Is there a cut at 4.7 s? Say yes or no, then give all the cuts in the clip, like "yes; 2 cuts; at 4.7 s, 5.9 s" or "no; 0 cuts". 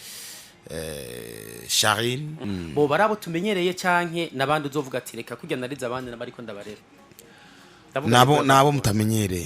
no; 1 cut; at 2.4 s